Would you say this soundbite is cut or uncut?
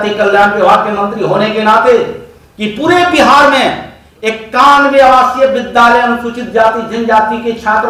uncut